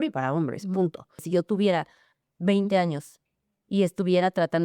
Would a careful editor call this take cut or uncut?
cut